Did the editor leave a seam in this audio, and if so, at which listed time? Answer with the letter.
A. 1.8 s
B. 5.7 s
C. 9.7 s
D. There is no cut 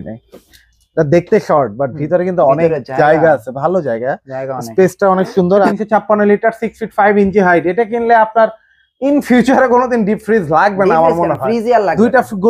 B